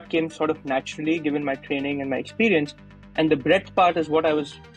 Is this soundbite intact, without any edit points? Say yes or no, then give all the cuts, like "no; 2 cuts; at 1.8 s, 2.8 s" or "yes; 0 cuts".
yes; 0 cuts